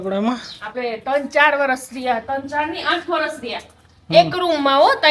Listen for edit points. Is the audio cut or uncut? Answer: uncut